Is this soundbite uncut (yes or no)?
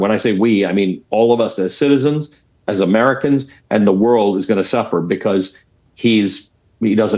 yes